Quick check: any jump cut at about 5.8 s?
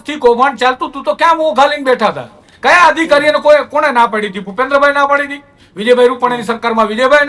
no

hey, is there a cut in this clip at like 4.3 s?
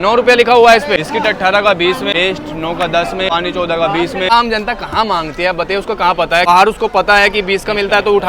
yes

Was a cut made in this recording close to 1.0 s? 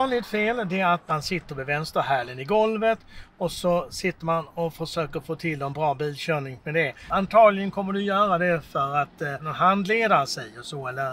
yes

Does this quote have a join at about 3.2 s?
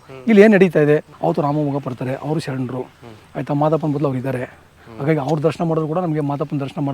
no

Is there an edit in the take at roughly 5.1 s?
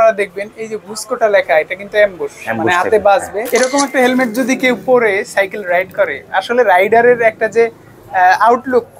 no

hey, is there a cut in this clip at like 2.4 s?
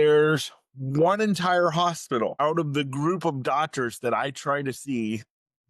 yes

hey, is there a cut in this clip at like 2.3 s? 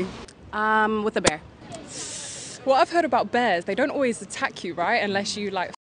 no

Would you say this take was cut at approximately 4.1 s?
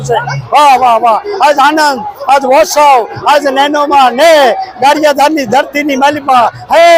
no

